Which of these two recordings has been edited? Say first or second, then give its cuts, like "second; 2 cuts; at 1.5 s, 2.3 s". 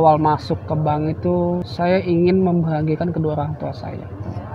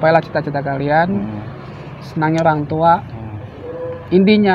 first; 1 cut; at 1.7 s